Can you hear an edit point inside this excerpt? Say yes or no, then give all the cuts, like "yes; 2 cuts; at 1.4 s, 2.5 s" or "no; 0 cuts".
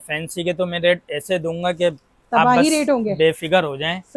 no; 0 cuts